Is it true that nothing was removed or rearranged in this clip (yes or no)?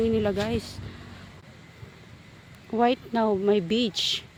yes